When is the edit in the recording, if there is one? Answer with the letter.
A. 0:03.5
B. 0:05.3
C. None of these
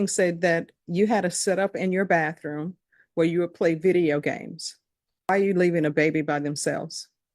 B